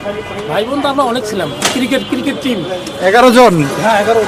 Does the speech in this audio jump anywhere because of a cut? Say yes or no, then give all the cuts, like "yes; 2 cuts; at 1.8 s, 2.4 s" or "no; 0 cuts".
no; 0 cuts